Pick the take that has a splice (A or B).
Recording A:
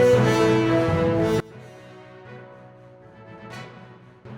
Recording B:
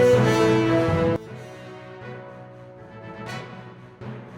A